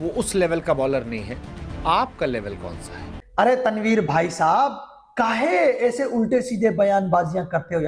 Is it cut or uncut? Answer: cut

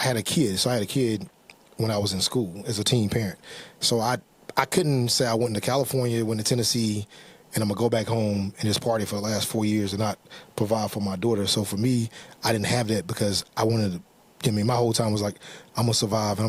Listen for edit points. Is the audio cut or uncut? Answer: uncut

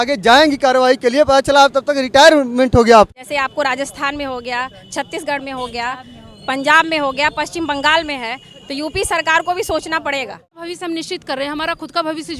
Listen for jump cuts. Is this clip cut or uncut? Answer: cut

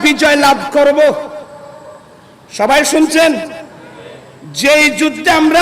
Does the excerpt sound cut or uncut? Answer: uncut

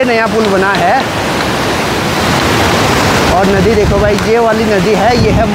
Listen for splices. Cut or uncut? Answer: uncut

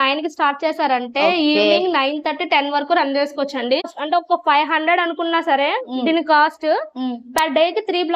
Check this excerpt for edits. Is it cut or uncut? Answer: cut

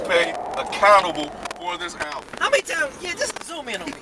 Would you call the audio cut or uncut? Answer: cut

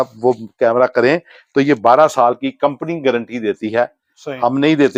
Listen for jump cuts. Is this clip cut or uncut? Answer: uncut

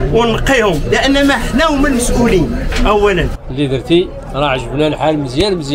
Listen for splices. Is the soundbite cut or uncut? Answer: cut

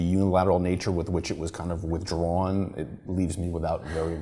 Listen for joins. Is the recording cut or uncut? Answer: uncut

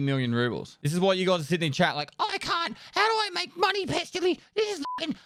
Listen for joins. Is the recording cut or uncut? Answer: uncut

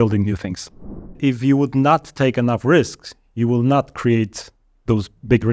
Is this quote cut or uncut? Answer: cut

